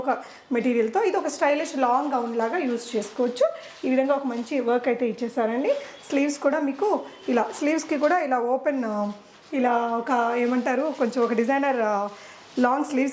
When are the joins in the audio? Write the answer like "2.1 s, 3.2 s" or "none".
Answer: none

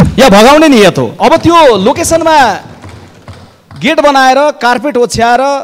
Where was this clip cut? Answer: 1.1 s

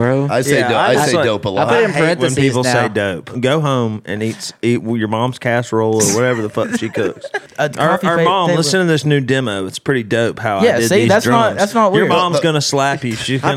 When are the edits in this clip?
3.3 s, 7.4 s

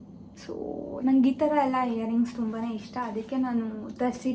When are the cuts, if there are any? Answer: none

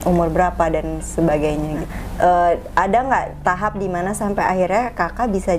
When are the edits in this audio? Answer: 1.9 s

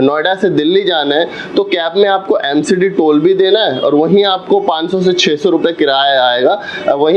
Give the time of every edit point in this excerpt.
none

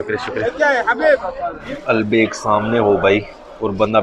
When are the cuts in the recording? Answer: 1.6 s

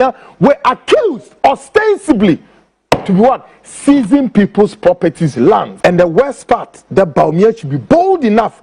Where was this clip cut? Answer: 5.7 s

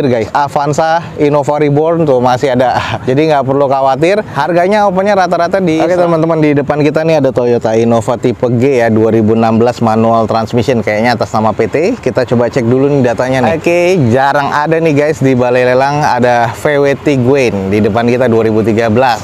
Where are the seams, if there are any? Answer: 5.8 s, 13.5 s

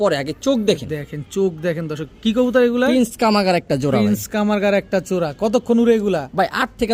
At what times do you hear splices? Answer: none

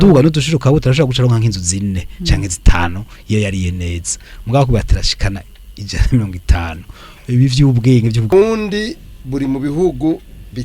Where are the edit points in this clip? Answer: 8.3 s

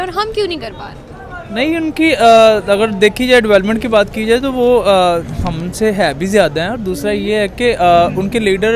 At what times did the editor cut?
none

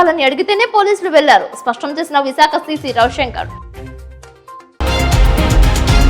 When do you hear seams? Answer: 4.8 s

